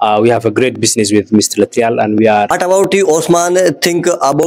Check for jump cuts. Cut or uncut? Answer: cut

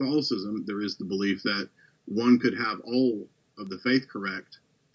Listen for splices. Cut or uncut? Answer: uncut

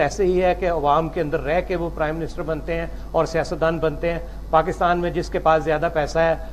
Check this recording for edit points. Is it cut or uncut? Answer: uncut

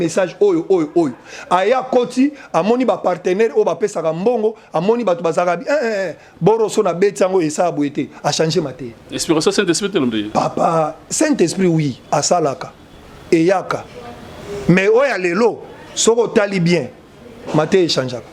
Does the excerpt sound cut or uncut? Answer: uncut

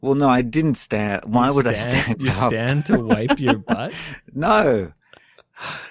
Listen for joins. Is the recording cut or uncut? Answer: uncut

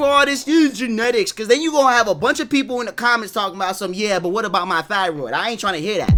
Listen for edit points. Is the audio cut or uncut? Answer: uncut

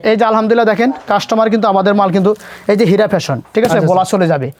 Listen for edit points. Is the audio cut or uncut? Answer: uncut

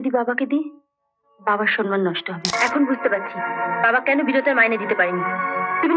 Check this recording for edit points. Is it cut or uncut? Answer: cut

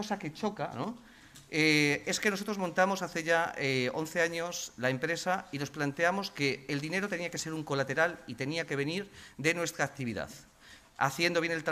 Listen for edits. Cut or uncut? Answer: cut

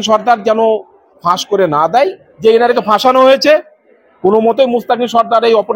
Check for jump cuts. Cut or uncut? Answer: cut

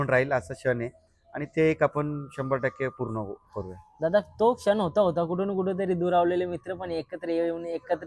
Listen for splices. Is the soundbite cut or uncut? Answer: uncut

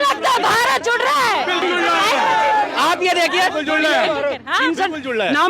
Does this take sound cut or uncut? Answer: cut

